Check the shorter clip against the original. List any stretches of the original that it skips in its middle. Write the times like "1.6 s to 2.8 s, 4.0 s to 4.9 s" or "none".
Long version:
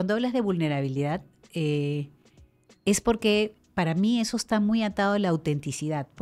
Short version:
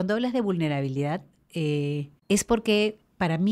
2.1 s to 2.7 s

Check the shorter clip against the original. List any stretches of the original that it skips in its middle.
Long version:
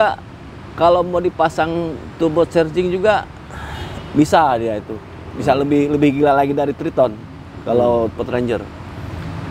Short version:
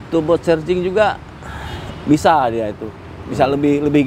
none

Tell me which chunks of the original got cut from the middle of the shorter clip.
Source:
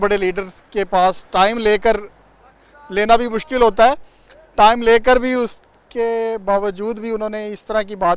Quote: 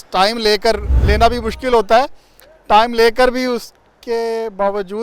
2.1 s to 2.8 s

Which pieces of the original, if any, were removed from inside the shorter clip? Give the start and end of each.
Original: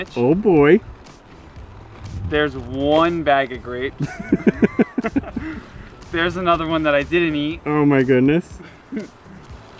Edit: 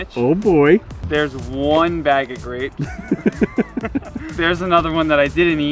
1.0 s to 2.2 s, 5.4 s to 6.0 s

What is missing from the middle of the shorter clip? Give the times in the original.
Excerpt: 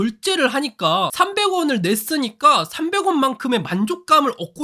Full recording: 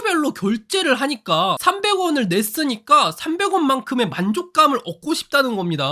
none

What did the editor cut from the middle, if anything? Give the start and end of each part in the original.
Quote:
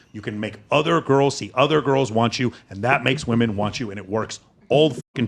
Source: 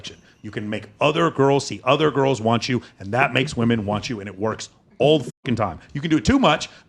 none

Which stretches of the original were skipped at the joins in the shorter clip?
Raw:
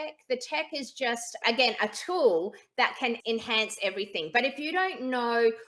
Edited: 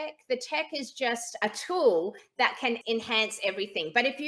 1.4 s to 1.8 s

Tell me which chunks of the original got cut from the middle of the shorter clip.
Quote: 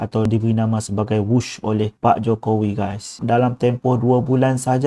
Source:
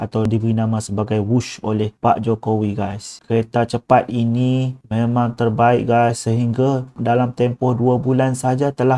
3.1 s to 6.9 s

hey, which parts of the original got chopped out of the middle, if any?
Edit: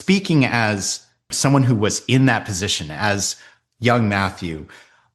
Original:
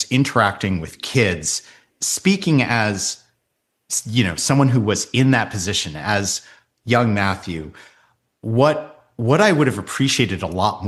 3.5 s to 4.4 s

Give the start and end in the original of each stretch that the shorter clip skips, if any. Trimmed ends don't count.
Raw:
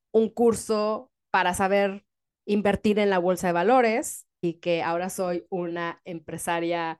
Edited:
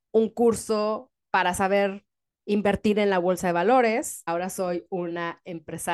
4.3 s to 4.9 s

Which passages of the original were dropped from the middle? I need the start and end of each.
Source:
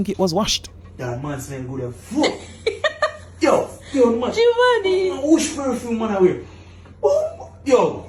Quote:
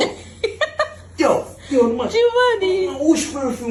none

